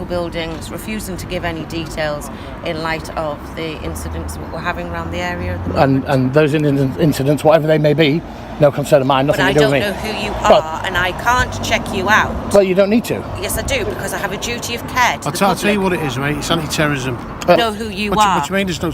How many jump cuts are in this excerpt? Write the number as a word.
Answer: one